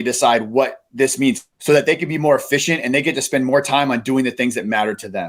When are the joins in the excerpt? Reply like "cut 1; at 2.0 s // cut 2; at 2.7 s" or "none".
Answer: cut 1; at 1.5 s